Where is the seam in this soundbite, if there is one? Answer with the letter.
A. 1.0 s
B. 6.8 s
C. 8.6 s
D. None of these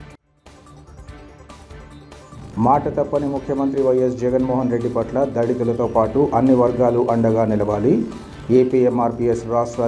A